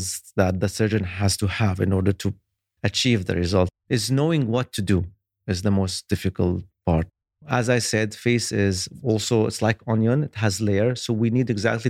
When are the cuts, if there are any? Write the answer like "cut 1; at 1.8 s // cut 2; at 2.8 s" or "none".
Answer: cut 1; at 7.1 s